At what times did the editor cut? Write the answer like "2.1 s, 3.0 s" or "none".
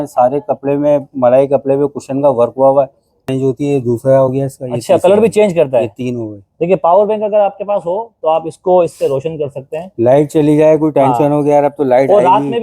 3.2 s